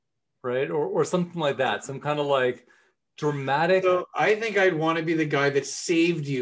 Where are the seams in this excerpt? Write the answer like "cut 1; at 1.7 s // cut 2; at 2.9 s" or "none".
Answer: none

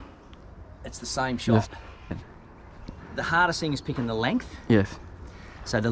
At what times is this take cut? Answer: cut 1; at 2.1 s

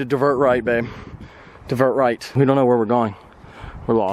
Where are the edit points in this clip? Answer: none

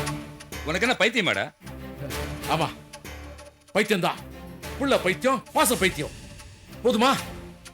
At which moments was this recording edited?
none

